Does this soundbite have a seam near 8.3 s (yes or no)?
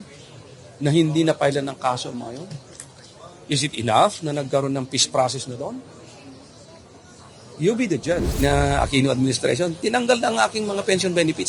yes